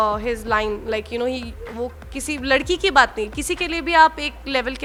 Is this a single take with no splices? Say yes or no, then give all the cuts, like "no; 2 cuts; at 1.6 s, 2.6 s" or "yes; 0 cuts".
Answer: yes; 0 cuts